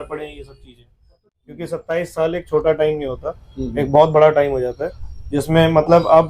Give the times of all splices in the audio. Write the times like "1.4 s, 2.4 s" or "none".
1.2 s